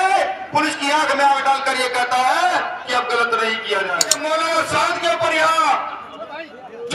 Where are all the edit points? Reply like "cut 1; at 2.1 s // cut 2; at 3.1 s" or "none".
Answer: cut 1; at 4.1 s

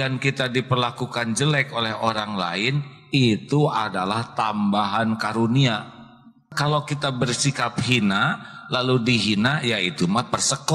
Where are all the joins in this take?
cut 1; at 6.5 s

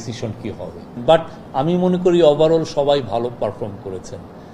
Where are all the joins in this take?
cut 1; at 0.9 s

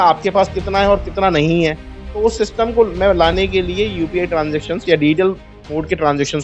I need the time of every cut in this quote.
none

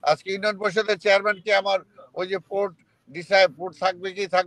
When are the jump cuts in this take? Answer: none

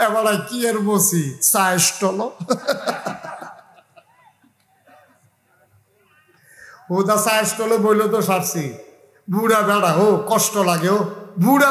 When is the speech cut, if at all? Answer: none

